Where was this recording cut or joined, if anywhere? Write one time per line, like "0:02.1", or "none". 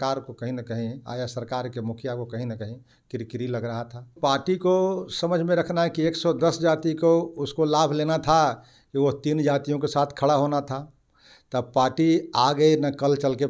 0:04.2